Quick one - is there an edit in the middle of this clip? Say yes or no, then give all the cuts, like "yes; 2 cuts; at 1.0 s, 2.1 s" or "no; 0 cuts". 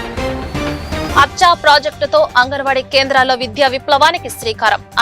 yes; 1 cut; at 0.9 s